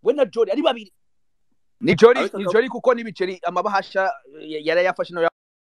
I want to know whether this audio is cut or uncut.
cut